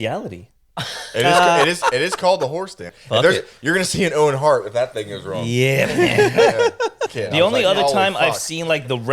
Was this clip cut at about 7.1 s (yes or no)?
yes